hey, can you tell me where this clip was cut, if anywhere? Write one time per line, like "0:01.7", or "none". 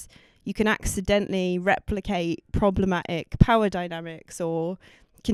none